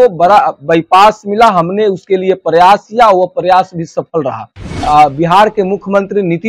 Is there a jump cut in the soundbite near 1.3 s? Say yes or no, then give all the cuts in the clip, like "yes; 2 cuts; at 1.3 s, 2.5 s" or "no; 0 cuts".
no; 1 cut; at 4.7 s